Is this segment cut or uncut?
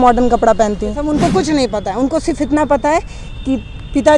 cut